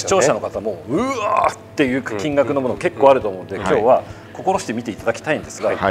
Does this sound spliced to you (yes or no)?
no